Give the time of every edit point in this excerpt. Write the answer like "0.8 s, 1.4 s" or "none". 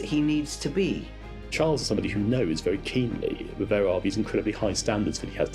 1.5 s